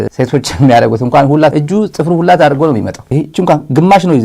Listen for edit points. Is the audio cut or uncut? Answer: cut